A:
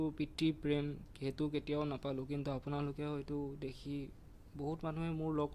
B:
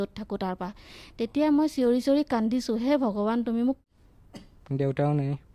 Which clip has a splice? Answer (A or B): B